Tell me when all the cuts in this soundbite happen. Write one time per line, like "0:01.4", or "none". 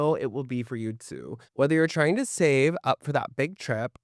0:01.4